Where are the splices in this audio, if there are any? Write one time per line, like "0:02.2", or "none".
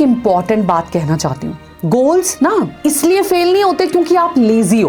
none